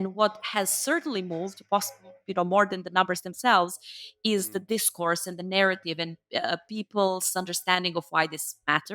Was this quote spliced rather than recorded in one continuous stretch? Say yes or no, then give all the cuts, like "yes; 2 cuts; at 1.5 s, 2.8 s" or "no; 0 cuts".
no; 0 cuts